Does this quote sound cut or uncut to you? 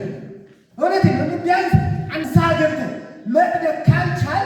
cut